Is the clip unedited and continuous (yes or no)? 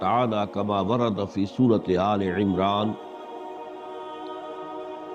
yes